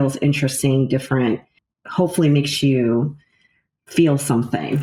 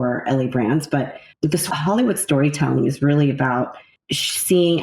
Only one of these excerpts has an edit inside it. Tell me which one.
second; 1 cut; at 1.7 s

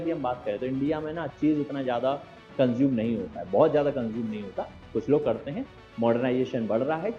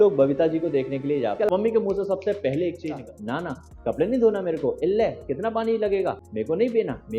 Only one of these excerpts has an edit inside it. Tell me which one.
second; 3 cuts; at 1.5 s, 3.0 s, 6.3 s

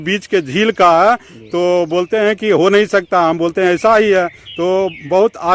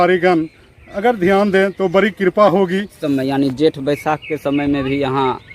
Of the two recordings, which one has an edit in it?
second; 1 cut; at 2.8 s

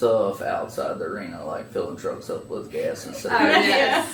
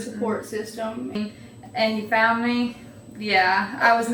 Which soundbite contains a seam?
second; 1 cut; at 1.1 s

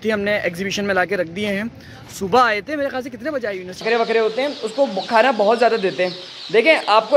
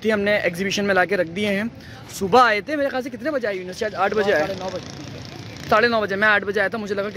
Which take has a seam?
first; 1 cut; at 3.8 s

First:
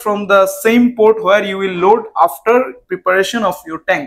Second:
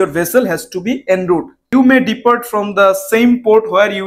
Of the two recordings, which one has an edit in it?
second; 1 cut; at 1.6 s

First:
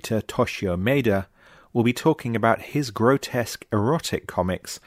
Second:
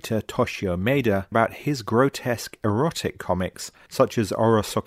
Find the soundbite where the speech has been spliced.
second; 1 cut; at 1.3 s

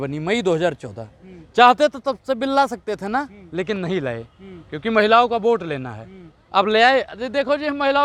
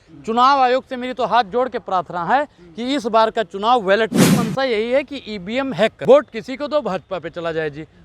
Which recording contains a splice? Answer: second; 2 cuts; at 4.3 s, 6.0 s

